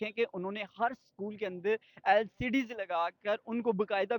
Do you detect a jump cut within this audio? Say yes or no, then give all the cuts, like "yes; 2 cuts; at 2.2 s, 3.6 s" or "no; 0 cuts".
no; 0 cuts